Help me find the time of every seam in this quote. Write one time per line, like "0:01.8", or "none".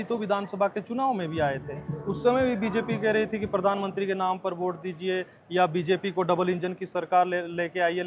none